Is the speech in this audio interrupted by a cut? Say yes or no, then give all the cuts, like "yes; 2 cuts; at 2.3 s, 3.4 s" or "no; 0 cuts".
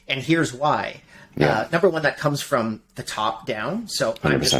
no; 0 cuts